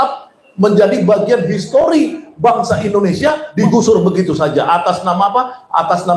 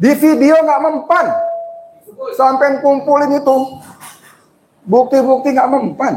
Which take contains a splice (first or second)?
first